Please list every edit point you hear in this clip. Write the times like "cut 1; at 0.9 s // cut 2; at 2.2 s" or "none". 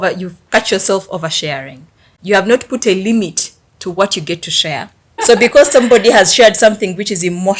cut 1; at 2.1 s // cut 2; at 5.2 s